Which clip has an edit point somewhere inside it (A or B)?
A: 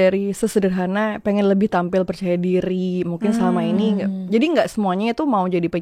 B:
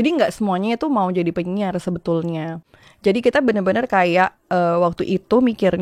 B